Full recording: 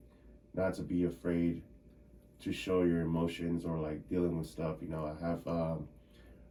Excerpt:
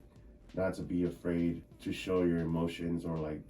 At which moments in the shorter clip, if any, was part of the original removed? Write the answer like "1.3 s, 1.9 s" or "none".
1.7 s